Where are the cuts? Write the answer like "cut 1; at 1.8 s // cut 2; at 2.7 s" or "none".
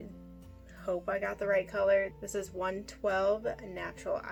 none

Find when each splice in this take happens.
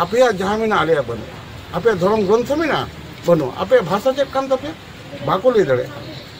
none

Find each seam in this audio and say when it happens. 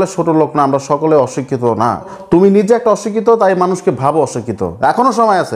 cut 1; at 2.1 s

